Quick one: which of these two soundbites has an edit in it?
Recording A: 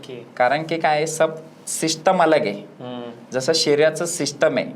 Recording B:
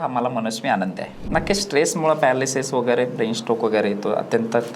B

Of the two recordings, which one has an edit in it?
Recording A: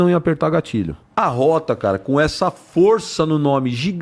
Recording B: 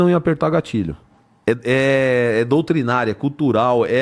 A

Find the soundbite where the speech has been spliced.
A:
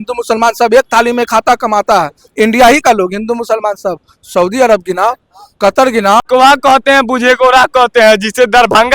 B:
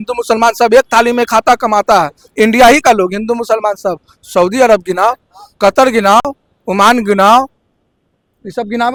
A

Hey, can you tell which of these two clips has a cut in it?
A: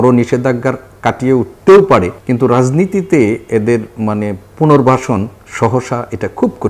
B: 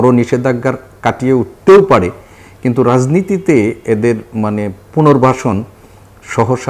A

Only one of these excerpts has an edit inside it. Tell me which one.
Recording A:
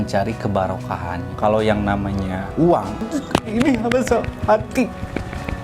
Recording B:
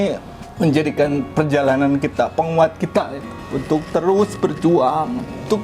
A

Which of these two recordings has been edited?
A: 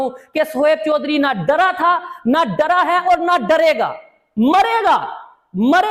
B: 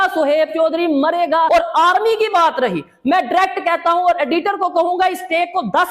B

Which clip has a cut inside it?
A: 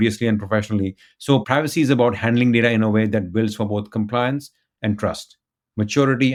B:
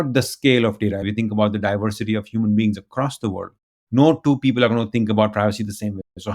B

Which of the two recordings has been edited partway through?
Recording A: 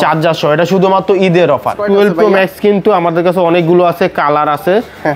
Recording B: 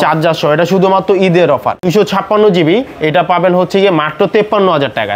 A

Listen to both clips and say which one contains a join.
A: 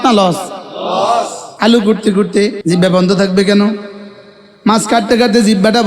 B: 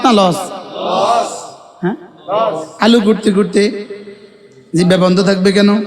A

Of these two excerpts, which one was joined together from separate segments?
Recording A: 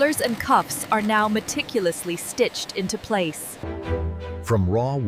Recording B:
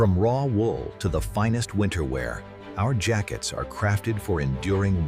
A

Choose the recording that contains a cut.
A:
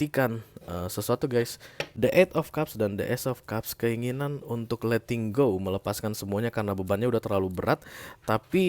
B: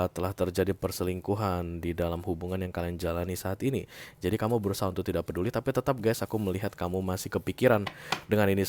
A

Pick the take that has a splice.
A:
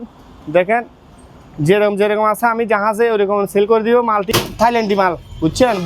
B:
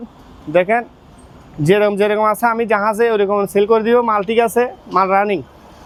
A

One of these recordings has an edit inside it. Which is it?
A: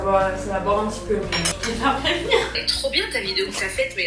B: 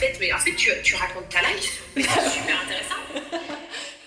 A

